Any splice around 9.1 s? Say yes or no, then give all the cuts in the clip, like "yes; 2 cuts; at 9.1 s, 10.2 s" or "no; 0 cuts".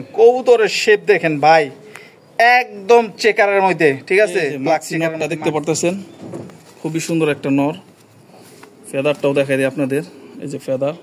no; 1 cut; at 4.9 s